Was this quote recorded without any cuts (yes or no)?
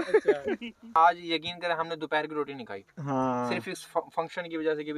no